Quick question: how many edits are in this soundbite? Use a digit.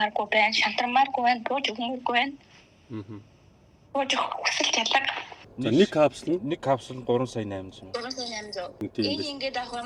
2